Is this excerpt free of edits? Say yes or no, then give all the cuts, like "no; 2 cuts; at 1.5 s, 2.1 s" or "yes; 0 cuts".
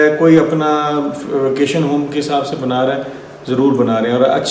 yes; 0 cuts